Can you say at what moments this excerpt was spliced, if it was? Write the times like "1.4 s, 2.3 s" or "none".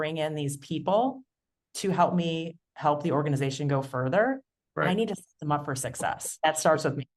6.3 s